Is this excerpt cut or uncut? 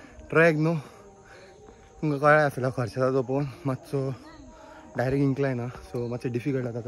uncut